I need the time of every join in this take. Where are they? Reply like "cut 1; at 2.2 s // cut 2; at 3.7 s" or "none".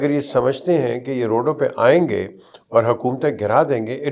none